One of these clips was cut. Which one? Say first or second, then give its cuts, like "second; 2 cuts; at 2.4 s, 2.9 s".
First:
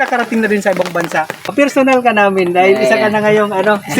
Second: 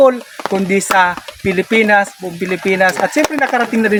first; 1 cut; at 1.5 s